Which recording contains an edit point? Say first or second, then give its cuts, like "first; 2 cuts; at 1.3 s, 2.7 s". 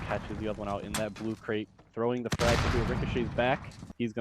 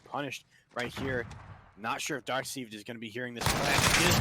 second; 1 cut; at 1.2 s